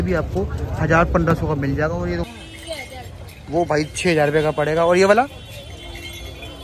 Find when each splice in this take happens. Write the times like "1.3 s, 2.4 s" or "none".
2.2 s